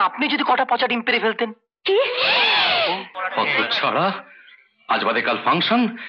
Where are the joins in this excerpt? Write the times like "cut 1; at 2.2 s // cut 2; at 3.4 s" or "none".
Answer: cut 1; at 3.1 s